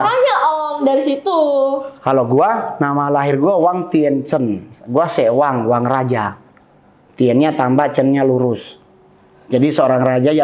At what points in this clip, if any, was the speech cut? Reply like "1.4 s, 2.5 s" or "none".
none